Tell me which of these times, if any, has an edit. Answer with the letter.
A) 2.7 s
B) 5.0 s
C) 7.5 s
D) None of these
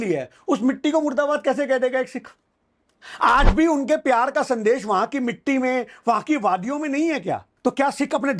C